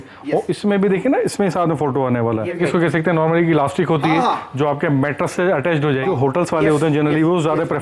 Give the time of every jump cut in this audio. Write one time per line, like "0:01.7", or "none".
0:02.6
0:06.1